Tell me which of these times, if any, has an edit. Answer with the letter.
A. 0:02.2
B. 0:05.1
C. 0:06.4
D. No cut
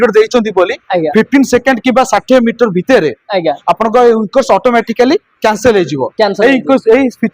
D